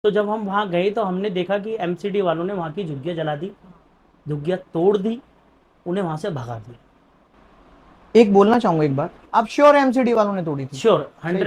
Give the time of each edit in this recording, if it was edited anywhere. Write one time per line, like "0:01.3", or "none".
none